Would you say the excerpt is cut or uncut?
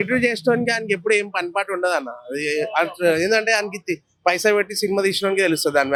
uncut